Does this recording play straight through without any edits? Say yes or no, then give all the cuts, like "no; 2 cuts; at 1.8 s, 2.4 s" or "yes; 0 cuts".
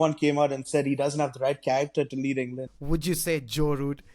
no; 1 cut; at 2.6 s